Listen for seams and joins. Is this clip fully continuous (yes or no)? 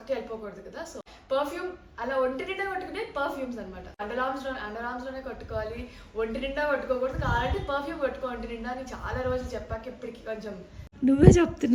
no